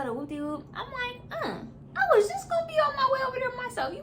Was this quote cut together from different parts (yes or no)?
yes